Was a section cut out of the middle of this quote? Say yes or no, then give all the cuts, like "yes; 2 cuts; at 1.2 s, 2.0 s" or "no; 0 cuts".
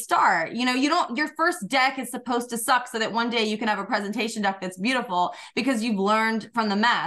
no; 0 cuts